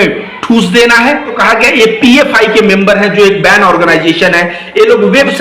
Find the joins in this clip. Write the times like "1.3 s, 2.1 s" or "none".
1.3 s